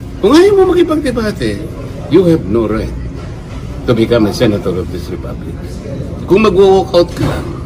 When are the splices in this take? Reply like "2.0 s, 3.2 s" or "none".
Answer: none